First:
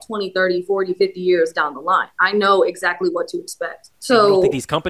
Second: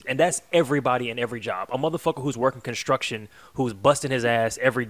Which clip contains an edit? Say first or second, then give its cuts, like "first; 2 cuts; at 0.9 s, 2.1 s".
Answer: first; 1 cut; at 3.9 s